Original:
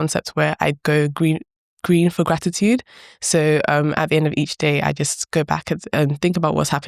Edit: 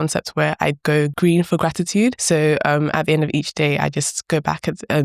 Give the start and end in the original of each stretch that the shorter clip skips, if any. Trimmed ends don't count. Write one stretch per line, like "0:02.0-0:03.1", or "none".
0:01.1-0:01.8
0:02.9-0:03.2